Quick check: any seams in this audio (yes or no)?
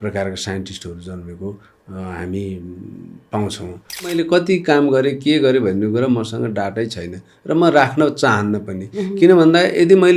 yes